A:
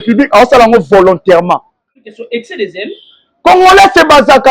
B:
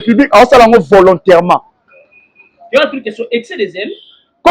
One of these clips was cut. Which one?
A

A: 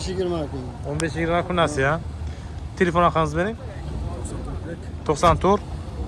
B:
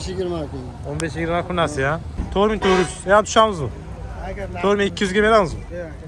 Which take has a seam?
B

